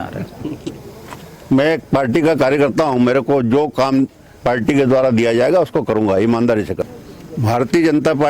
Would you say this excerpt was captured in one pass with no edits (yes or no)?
no